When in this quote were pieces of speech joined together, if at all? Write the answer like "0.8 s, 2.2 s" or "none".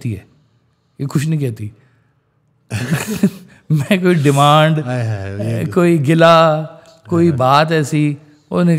none